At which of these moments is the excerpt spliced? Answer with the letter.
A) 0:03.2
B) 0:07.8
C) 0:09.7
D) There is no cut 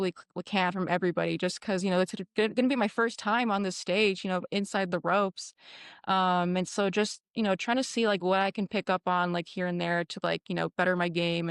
D